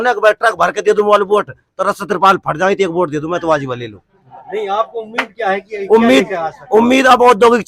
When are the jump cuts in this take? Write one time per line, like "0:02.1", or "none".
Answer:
none